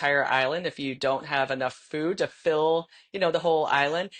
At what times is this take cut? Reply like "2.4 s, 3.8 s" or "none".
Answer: none

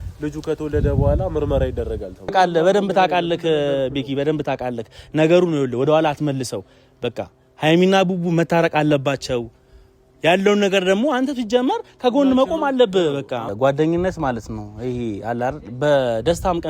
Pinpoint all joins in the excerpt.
2.3 s, 13.4 s

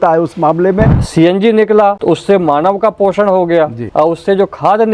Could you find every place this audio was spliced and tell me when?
1.0 s, 2.0 s, 3.8 s

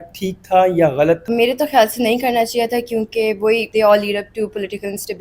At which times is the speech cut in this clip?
1.3 s, 3.7 s

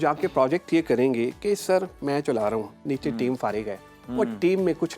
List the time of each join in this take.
none

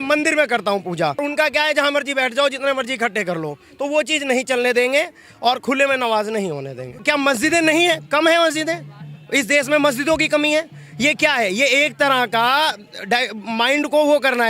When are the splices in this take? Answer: 1.2 s, 7.0 s

